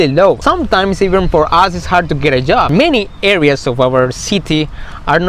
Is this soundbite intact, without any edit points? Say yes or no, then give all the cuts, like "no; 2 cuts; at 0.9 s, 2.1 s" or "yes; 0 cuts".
no; 1 cut; at 2.7 s